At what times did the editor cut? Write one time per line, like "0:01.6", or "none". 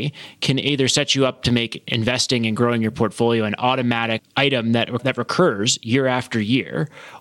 0:04.3
0:05.0